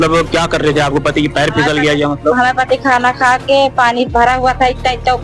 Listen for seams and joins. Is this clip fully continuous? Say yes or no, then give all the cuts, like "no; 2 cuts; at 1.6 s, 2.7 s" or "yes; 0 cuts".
yes; 0 cuts